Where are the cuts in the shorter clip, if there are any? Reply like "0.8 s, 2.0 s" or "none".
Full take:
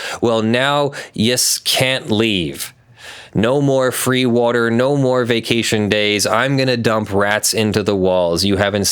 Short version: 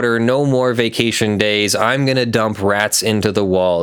none